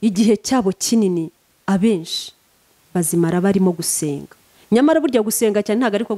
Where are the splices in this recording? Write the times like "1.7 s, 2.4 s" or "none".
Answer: none